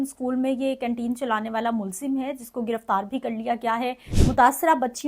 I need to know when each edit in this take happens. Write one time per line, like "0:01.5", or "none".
0:04.1